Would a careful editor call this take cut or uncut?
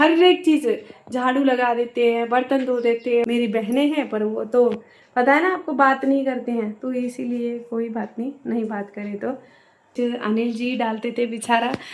cut